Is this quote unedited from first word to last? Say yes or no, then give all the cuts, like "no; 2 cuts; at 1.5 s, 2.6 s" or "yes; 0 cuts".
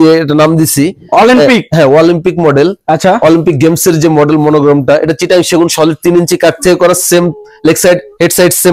yes; 0 cuts